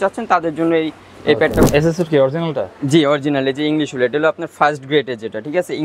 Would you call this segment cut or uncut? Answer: cut